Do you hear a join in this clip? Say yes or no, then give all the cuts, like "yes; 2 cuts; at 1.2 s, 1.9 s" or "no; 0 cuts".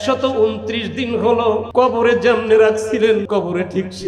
yes; 2 cuts; at 1.6 s, 3.2 s